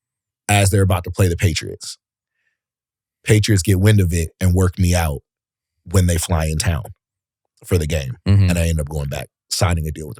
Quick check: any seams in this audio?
no; 0 cuts

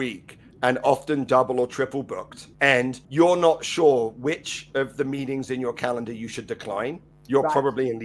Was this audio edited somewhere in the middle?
yes; 2 cuts; at 2.9 s, 7.1 s

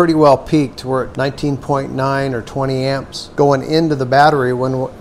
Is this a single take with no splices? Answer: no; 2 cuts; at 1.1 s, 3.2 s

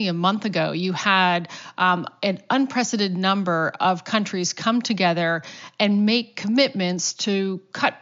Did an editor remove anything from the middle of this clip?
no; 0 cuts

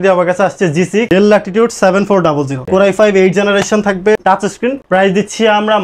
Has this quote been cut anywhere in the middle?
yes; 2 cuts; at 1.1 s, 4.2 s

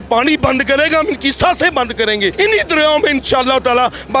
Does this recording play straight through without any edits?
no; 1 cut; at 2.3 s

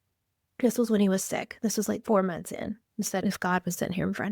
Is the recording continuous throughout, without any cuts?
no; 2 cuts; at 2.0 s, 3.2 s

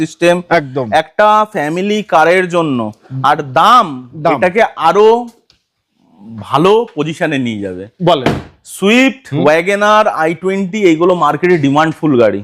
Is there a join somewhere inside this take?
no; 0 cuts

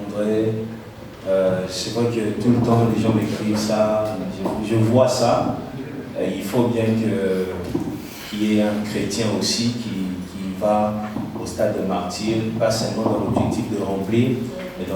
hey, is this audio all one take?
yes; 0 cuts

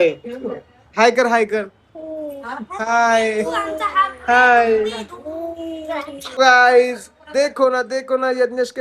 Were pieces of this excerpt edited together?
yes; 1 cut; at 6.2 s

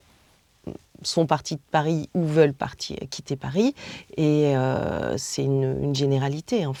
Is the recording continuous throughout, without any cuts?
yes; 0 cuts

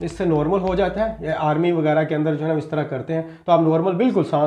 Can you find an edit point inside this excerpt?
no; 0 cuts

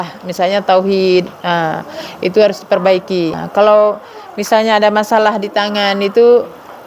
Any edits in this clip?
yes; 1 cut; at 3.4 s

